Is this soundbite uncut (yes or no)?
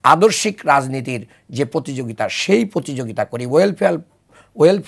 yes